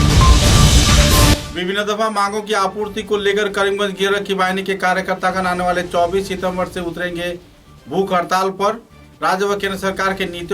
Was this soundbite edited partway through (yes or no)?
no